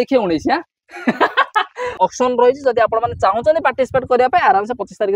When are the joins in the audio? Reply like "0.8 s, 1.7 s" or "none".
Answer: 1.9 s